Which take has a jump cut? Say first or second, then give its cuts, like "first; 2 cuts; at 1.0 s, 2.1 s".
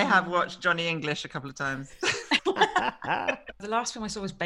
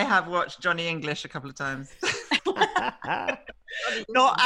first; 1 cut; at 3.6 s